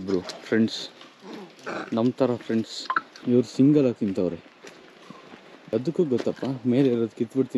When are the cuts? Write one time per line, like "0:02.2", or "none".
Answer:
0:03.1
0:05.7